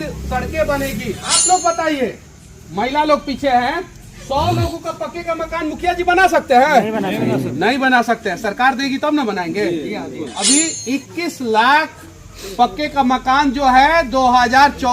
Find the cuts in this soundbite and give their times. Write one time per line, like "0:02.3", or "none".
0:01.3
0:10.3